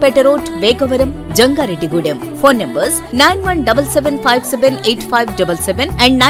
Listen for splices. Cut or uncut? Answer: uncut